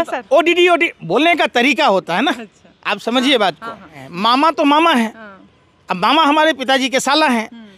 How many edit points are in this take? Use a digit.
1